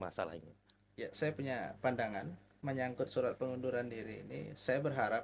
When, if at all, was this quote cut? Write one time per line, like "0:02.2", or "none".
0:02.5